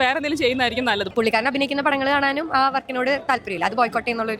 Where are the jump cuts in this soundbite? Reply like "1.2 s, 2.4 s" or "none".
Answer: 1.1 s